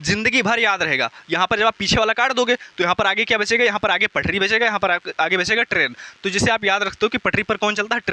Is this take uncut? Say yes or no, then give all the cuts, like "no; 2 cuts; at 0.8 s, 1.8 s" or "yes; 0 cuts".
yes; 0 cuts